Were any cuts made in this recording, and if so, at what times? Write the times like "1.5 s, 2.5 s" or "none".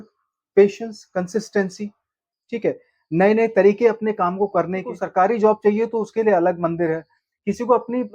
5.0 s

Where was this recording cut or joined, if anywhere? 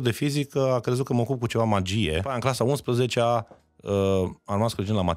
2.3 s

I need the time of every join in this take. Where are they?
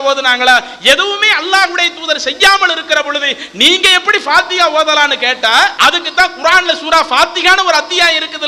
5.7 s

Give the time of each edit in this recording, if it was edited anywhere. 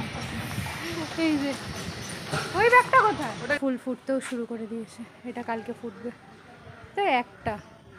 3.6 s

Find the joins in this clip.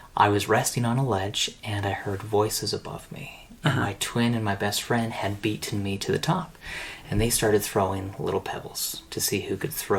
none

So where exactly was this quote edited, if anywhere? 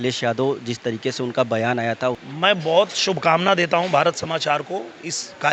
2.2 s

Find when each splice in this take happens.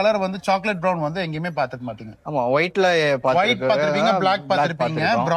none

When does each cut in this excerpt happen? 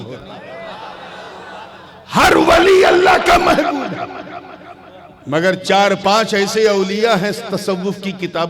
1.9 s

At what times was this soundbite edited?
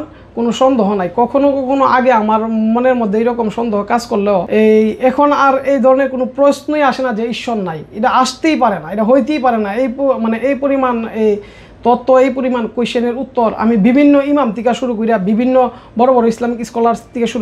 4.5 s

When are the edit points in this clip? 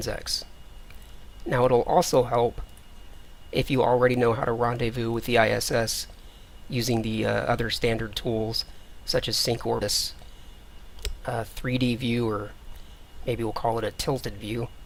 none

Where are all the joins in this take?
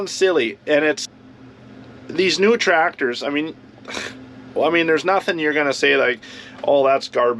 1.1 s

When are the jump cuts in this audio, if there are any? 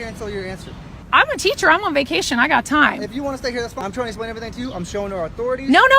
1.0 s, 3.9 s

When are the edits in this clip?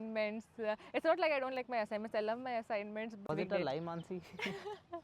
3.2 s

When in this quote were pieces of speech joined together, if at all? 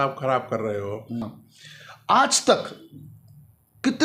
1.3 s

